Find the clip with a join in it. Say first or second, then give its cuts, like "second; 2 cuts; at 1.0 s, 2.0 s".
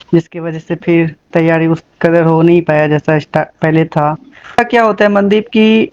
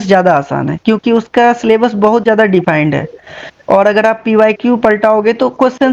first; 1 cut; at 4.6 s